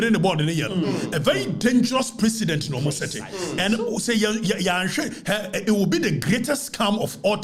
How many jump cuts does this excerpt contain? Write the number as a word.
zero